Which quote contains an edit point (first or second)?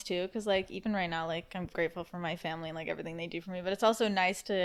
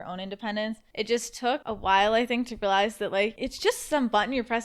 second